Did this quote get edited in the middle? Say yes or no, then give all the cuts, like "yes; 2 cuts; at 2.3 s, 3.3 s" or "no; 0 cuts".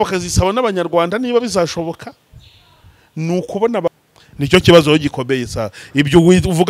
yes; 1 cut; at 3.9 s